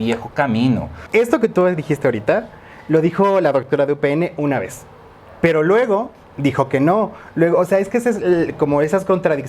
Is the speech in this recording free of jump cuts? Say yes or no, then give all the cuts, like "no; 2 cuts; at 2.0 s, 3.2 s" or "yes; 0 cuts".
no; 1 cut; at 1.0 s